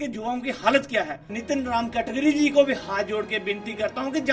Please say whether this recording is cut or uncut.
cut